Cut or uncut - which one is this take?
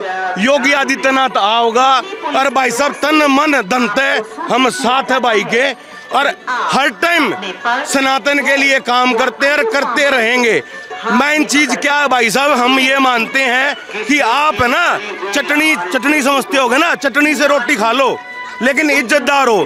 uncut